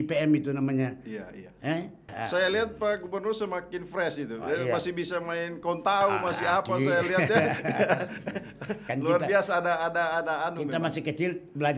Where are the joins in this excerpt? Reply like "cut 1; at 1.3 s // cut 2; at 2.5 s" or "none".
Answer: cut 1; at 2.1 s